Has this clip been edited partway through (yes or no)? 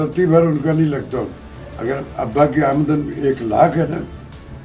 yes